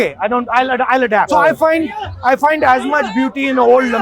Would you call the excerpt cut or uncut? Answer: cut